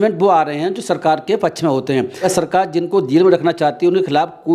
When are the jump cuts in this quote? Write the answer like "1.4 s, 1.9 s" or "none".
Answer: 2.2 s